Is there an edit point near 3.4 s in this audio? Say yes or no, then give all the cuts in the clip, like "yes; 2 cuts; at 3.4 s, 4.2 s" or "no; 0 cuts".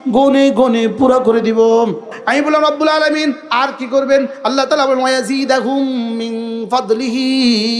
no; 1 cut; at 2.2 s